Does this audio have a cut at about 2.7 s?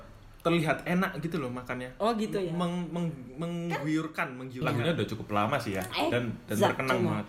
no; 1 cut; at 4.6 s

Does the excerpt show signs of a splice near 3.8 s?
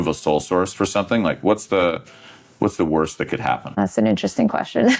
yes; 1 cut; at 3.8 s

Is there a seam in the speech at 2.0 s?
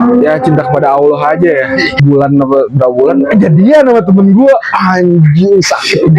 yes; 1 cut; at 2.0 s

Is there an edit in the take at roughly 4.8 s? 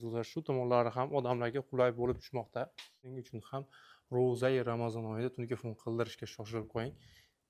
no; 1 cut; at 3.2 s

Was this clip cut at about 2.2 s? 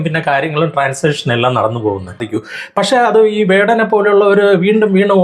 yes; 1 cut; at 2.2 s

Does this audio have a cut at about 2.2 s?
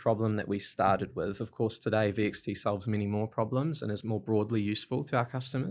no; 1 cut; at 4.0 s

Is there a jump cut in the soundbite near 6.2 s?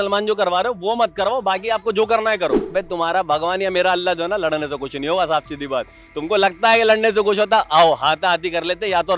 no; 1 cut; at 2.7 s

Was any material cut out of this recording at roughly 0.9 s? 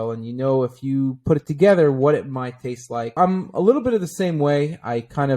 no; 1 cut; at 3.2 s

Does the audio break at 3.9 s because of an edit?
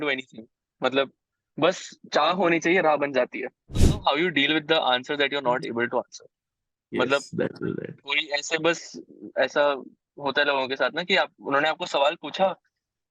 yes; 1 cut; at 3.9 s

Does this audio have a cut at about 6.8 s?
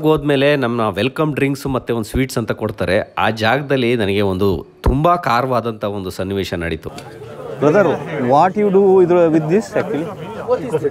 yes; 1 cut; at 6.8 s

